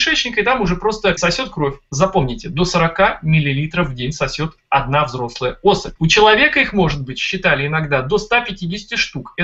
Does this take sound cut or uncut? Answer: cut